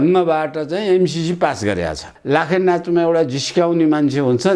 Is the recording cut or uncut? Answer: cut